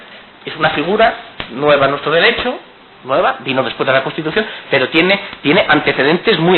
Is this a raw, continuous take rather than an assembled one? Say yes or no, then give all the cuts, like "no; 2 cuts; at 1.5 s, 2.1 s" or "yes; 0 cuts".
yes; 0 cuts